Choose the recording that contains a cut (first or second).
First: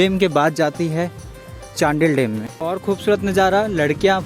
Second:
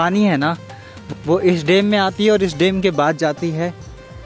first